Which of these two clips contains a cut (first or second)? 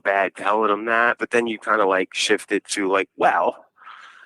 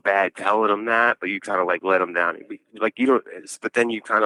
first